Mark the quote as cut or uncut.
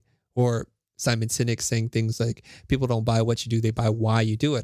uncut